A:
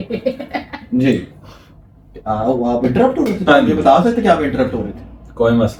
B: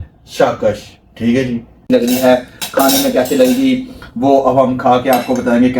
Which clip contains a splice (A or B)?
B